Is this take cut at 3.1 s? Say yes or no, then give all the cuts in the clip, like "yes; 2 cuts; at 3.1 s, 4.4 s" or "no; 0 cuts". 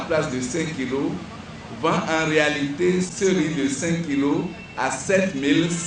yes; 1 cut; at 3.1 s